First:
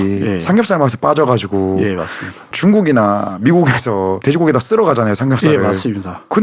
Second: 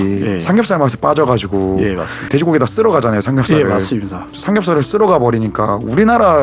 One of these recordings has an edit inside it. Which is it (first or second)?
second